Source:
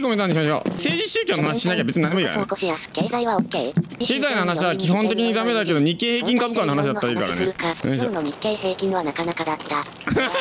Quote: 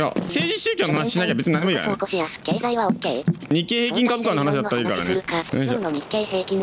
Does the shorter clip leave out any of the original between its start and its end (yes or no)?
yes